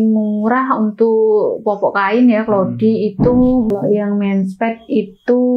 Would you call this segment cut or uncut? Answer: cut